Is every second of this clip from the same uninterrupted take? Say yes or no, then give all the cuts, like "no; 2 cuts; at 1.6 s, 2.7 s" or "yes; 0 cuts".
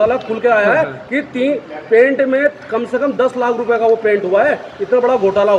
yes; 0 cuts